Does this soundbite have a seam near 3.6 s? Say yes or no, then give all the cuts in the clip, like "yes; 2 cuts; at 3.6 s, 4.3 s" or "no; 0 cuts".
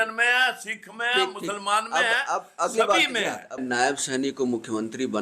yes; 1 cut; at 3.6 s